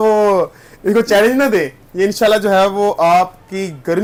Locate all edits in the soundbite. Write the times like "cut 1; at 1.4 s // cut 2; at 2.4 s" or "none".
none